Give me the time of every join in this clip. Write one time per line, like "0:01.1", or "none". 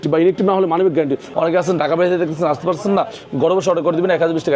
0:01.3